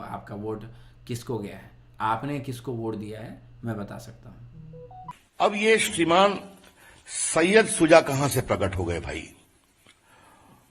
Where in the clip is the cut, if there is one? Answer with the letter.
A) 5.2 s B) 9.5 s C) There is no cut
A